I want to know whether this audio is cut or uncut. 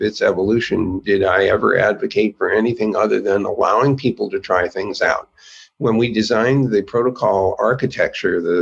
uncut